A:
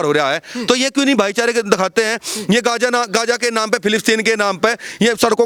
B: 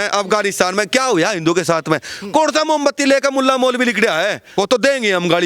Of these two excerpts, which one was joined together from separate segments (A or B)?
B